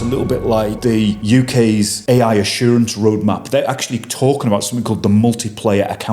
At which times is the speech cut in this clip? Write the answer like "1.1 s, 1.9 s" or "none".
1.1 s, 2.0 s